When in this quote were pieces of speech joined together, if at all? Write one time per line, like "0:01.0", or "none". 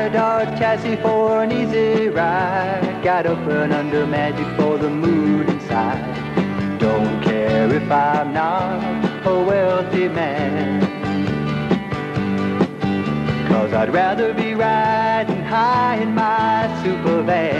none

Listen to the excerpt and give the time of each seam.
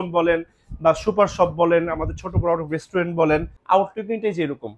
0:03.5

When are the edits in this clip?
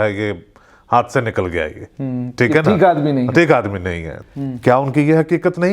0:04.2

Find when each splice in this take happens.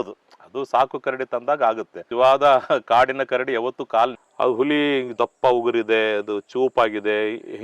0:04.2

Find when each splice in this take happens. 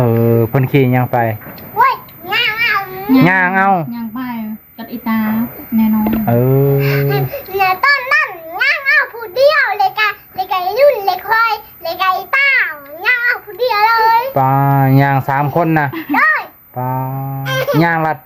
none

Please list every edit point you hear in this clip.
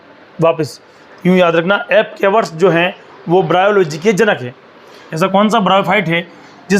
0:05.0

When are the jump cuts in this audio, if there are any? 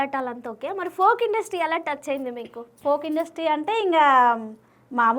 none

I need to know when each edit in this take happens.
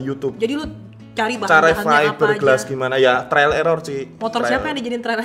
0:04.2

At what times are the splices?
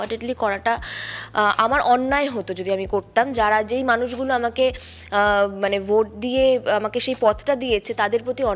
none

